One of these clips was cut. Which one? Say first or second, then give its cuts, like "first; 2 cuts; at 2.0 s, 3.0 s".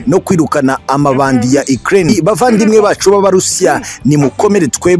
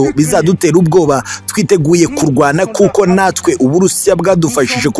first; 1 cut; at 2.2 s